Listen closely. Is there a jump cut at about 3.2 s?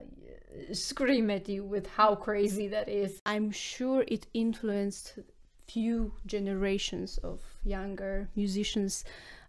yes; 1 cut; at 3.2 s

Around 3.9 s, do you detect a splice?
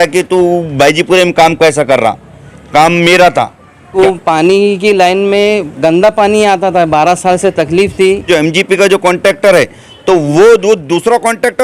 yes; 2 cuts; at 3.9 s, 8.3 s

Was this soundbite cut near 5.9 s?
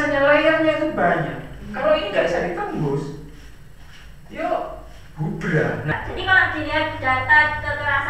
yes; 1 cut; at 5.9 s

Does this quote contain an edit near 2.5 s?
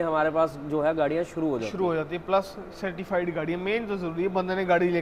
no; 0 cuts

